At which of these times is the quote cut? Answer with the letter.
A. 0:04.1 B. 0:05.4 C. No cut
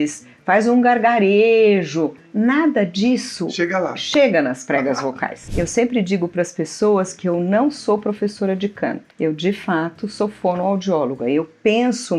B